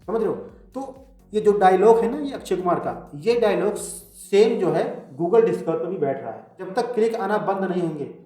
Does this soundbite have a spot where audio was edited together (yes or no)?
yes